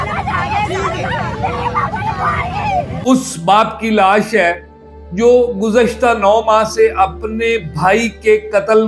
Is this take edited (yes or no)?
yes